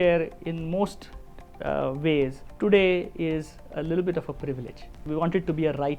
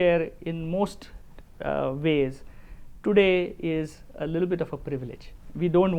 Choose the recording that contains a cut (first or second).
first